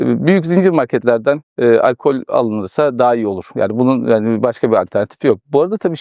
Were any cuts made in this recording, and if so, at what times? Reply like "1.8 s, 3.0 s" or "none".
none